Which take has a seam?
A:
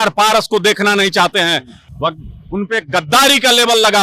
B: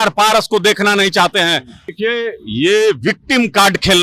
B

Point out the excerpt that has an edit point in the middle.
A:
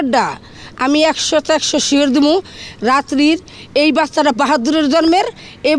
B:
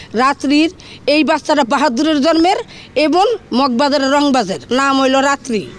B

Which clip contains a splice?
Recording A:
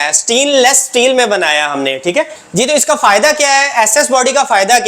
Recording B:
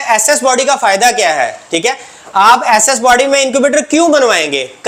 A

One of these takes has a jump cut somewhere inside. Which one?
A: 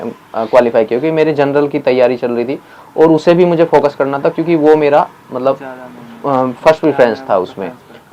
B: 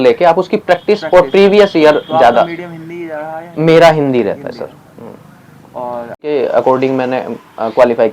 B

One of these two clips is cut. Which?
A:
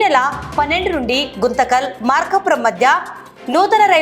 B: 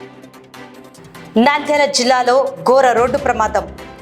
B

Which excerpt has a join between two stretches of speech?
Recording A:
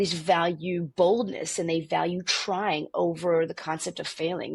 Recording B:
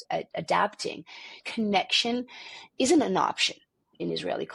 B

